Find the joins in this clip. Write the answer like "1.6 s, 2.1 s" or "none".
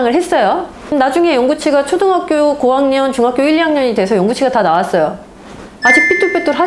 0.9 s